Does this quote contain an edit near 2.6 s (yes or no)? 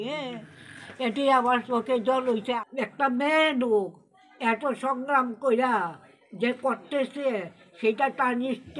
yes